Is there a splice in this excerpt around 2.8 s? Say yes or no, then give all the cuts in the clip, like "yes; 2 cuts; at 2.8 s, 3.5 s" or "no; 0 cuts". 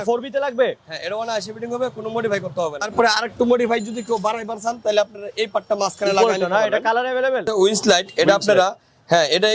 yes; 2 cuts; at 2.8 s, 7.5 s